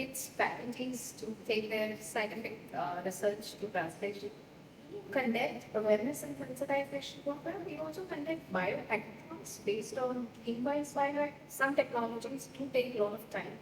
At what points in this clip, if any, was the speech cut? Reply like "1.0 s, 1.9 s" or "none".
5.0 s, 11.4 s

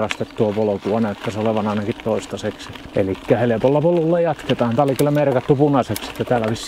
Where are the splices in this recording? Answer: 2.7 s

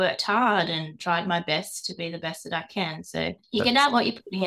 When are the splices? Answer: 3.4 s

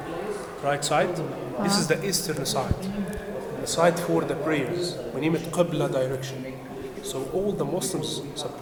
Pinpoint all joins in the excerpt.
none

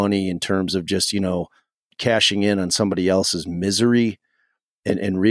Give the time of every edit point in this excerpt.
1.8 s

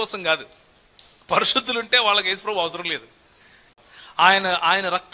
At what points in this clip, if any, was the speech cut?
3.7 s

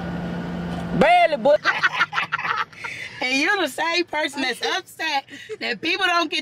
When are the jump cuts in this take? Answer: 1.6 s

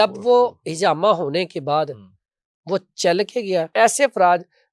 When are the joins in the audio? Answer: 3.7 s

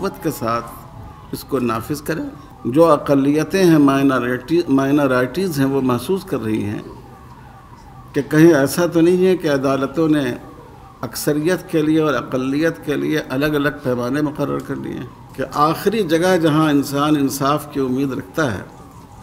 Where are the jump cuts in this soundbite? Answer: 2.4 s, 15.2 s

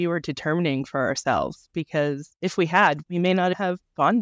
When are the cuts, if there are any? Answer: 3.3 s

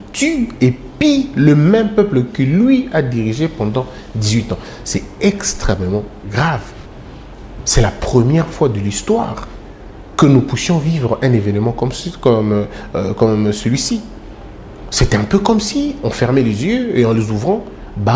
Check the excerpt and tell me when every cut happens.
none

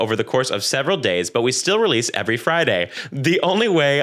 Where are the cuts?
3.1 s

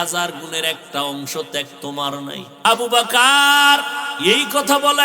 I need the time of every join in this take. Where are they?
2.5 s, 4.0 s

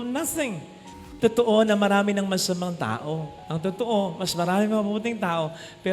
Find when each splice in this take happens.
1.0 s

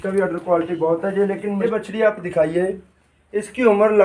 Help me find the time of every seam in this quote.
1.5 s

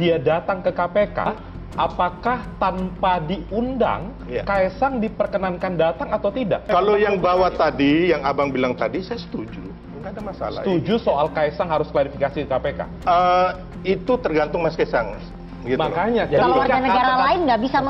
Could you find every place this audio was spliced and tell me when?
1.3 s, 6.7 s

